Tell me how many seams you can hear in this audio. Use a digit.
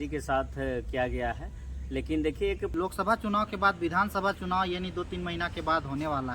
1